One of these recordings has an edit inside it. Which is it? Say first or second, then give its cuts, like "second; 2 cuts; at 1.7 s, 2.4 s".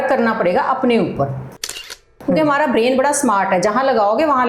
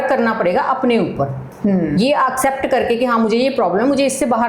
first; 1 cut; at 1.8 s